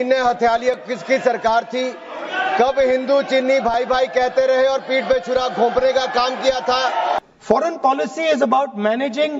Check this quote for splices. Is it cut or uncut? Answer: cut